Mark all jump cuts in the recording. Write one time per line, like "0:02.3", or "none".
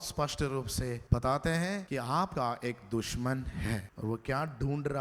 0:01.0
0:02.2
0:03.9